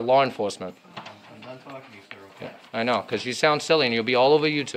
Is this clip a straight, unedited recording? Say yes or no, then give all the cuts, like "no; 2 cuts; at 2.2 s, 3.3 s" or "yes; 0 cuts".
yes; 0 cuts